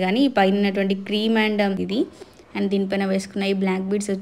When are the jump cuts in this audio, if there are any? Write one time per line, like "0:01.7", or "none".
0:01.8